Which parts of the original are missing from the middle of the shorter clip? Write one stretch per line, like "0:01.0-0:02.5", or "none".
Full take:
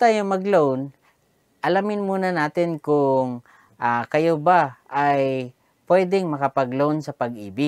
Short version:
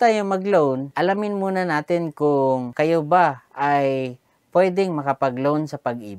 0:00.9-0:01.5
0:03.4-0:04.1